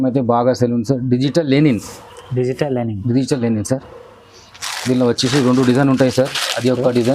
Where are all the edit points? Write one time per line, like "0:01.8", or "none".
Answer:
none